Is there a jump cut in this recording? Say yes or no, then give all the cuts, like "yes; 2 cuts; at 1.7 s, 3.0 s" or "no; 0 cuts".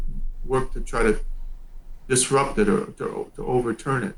no; 0 cuts